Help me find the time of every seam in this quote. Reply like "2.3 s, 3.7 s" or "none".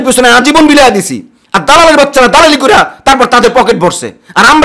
none